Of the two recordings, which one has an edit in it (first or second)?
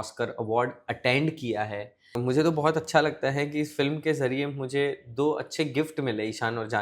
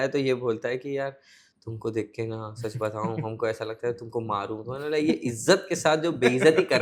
first